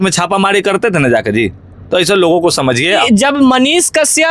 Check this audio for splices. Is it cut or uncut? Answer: cut